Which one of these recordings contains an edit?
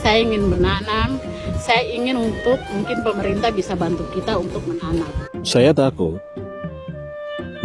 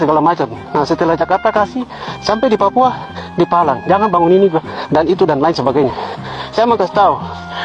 first; 1 cut; at 5.2 s

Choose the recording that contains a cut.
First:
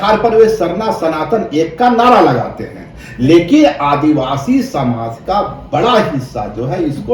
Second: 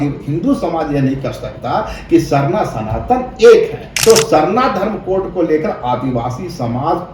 second; 1 cut; at 3.8 s

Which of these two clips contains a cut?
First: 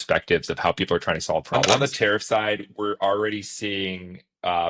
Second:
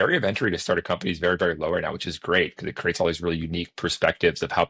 first; 1 cut; at 1.7 s

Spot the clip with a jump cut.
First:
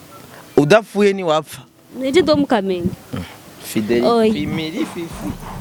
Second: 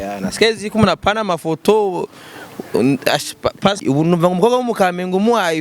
second; 1 cut; at 3.8 s

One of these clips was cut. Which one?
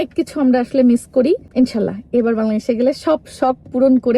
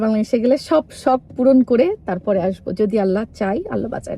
first; 1 cut; at 1.5 s

